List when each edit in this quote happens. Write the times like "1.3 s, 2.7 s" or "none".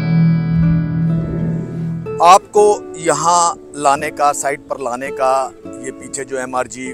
1.6 s